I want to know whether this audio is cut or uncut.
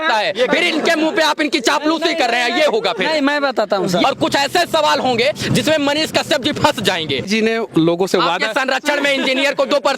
cut